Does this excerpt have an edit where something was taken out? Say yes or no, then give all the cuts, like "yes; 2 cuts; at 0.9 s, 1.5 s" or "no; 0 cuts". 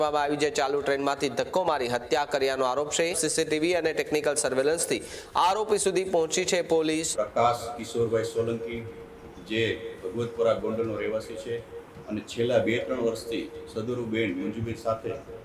yes; 2 cuts; at 3.2 s, 7.1 s